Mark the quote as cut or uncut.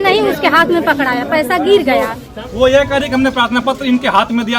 cut